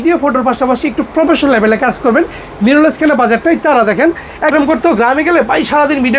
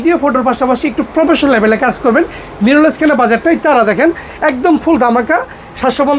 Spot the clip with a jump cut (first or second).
first